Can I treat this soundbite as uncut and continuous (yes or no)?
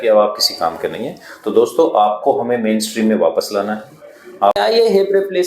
no